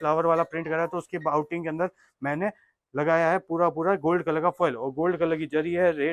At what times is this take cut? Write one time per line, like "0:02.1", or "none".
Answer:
none